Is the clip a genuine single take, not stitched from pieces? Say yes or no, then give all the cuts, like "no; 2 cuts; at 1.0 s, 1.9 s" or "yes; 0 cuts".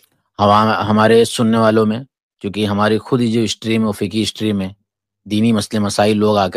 yes; 0 cuts